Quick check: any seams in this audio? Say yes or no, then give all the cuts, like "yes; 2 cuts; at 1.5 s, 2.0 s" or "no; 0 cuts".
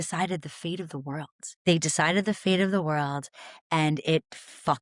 yes; 1 cut; at 1.4 s